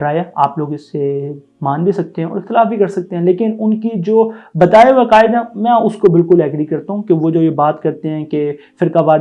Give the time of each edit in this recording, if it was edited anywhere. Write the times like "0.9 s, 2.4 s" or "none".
none